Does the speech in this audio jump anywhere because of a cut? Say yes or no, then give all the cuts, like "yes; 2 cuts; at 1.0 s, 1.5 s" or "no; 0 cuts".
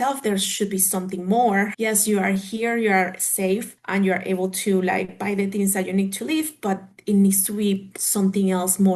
yes; 2 cuts; at 1.7 s, 3.8 s